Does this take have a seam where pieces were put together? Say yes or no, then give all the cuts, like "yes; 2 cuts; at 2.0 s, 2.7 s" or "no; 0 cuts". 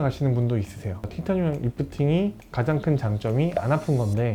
yes; 1 cut; at 1.0 s